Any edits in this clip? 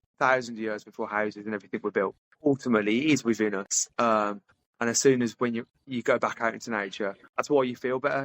yes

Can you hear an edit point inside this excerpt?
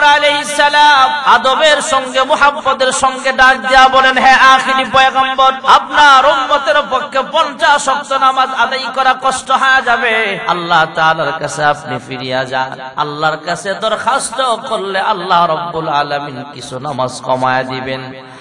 yes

